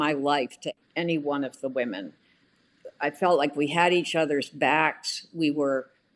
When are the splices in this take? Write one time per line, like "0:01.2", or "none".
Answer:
none